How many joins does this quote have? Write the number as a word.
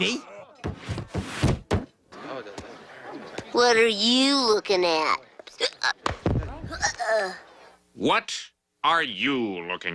zero